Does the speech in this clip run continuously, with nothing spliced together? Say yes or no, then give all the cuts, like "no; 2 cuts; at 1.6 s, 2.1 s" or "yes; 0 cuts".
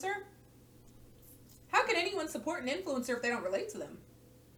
yes; 0 cuts